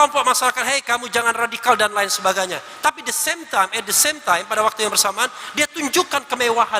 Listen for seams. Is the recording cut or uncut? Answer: uncut